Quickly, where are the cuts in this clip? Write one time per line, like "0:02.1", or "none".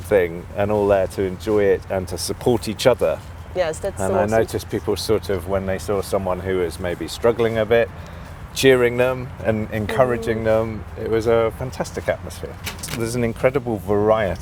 0:12.9